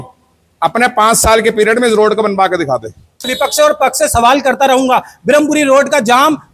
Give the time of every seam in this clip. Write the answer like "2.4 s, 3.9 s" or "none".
3.3 s